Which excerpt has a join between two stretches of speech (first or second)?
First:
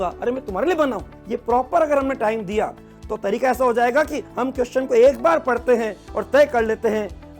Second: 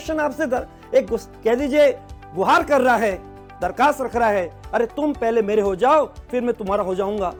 first